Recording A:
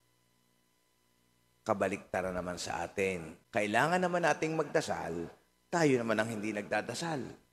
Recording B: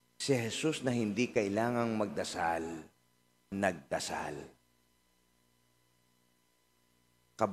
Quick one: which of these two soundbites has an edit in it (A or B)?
A